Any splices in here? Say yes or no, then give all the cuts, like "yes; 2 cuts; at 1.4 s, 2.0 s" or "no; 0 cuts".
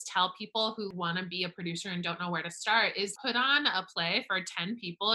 yes; 2 cuts; at 0.9 s, 3.1 s